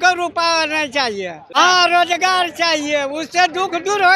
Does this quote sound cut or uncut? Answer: cut